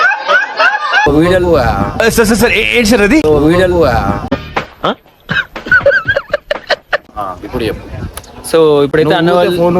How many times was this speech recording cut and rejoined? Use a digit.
1